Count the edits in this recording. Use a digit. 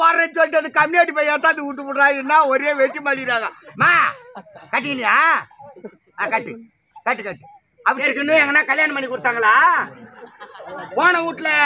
1